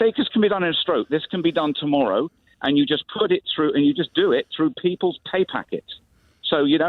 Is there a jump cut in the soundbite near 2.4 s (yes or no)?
yes